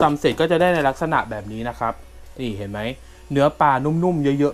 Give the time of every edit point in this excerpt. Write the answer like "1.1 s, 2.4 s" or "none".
none